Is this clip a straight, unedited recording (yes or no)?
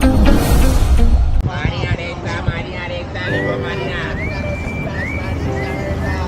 no